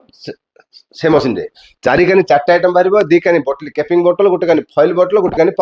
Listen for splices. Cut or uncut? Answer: uncut